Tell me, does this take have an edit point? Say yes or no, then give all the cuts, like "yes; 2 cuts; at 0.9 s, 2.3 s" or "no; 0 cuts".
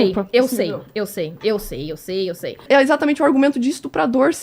yes; 1 cut; at 2.6 s